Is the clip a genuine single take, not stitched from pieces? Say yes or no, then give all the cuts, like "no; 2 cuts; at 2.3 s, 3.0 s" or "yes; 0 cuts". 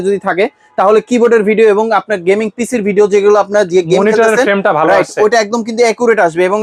yes; 0 cuts